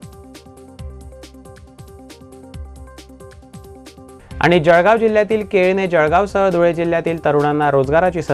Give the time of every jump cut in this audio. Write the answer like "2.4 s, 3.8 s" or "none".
1.2 s